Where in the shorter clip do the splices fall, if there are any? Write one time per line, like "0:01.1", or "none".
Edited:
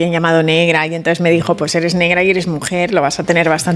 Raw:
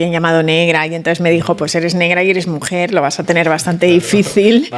none